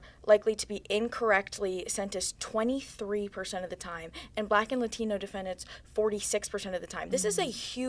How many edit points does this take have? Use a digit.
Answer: 0